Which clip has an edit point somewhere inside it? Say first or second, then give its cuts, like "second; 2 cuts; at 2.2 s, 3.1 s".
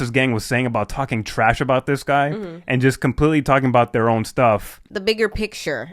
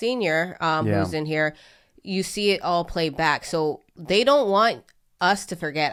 first; 1 cut; at 4.8 s